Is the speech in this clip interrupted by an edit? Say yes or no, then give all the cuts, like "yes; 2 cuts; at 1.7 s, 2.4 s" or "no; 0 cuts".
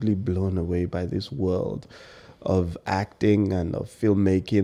no; 0 cuts